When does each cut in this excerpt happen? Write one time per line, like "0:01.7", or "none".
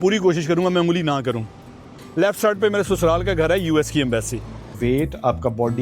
0:02.0
0:04.8